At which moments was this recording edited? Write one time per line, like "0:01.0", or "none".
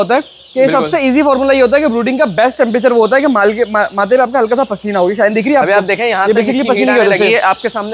none

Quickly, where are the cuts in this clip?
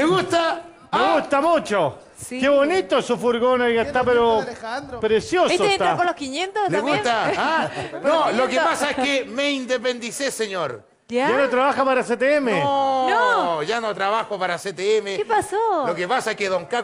none

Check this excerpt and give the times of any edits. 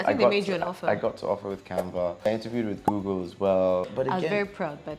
0:02.3
0:03.9

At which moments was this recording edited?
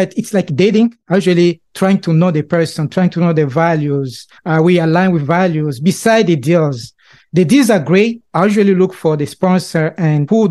none

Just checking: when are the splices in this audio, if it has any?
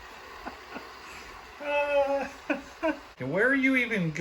0:03.2

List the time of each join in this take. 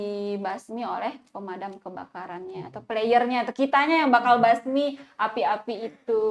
none

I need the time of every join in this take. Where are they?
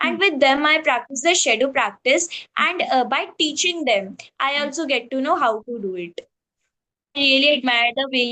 0:07.0

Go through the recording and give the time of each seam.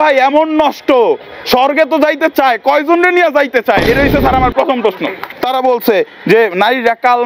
0:05.2

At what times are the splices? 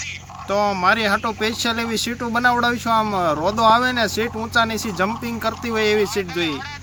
none

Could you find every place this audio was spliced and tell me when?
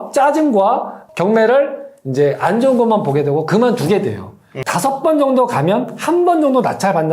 0:01.0
0:04.5

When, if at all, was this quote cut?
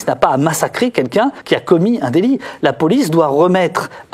0:01.4

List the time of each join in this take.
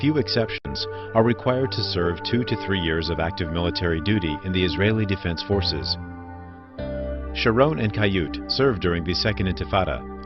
0:02.7

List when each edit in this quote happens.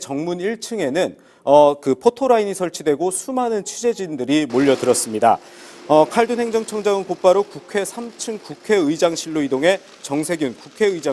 none

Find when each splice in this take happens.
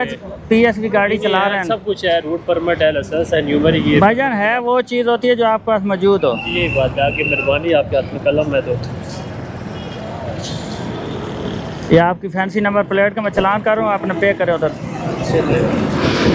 none

